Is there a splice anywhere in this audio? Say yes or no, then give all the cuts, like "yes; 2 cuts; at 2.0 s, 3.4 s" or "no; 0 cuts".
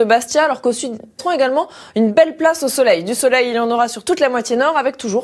no; 0 cuts